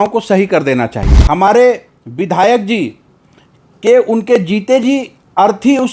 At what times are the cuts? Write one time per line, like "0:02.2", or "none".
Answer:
0:01.1